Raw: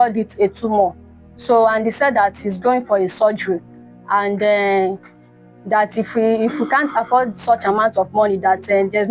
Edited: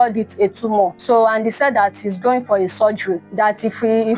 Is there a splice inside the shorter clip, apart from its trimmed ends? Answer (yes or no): yes